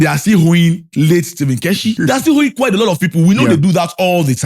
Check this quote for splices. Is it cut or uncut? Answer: cut